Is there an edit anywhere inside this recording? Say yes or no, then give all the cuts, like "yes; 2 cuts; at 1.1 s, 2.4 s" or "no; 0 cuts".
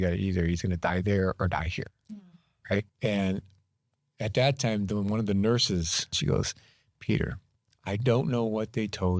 yes; 2 cuts; at 2.9 s, 6.2 s